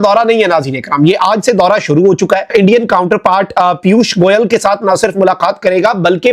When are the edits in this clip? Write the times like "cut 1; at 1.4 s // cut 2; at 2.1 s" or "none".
cut 1; at 2.5 s